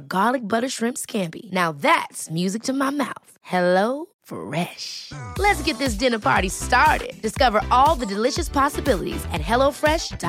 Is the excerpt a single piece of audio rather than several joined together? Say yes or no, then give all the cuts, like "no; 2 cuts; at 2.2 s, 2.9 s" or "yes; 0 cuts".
yes; 0 cuts